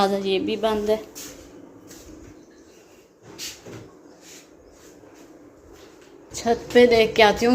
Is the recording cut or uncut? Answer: cut